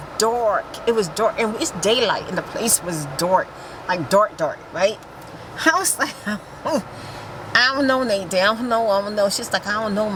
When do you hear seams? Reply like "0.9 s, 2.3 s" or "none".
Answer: none